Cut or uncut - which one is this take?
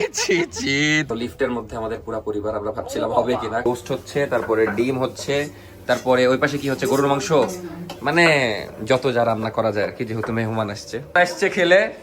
cut